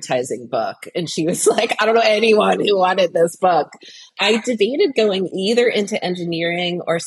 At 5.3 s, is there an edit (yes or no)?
yes